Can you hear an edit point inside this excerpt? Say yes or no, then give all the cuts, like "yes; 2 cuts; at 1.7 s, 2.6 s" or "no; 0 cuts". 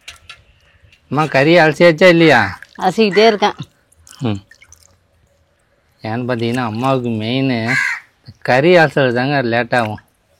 no; 0 cuts